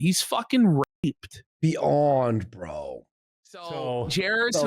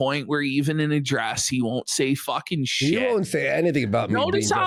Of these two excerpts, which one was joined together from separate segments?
first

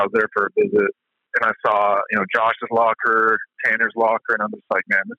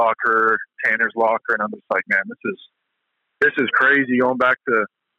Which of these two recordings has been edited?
first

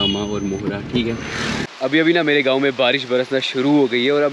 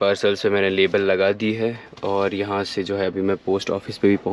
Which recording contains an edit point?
first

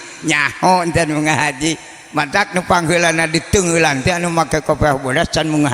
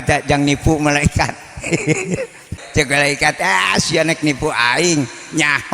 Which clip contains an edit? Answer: second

